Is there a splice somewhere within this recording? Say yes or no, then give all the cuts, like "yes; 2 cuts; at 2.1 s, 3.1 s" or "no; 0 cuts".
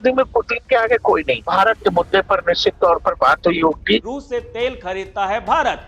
yes; 2 cuts; at 1.5 s, 4.2 s